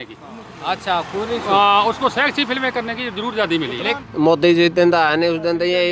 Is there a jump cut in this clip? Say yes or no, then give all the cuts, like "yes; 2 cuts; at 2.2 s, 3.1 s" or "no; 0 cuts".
yes; 1 cut; at 4.0 s